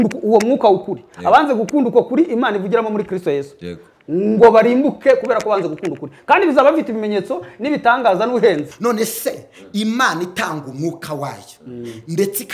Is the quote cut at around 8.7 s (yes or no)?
yes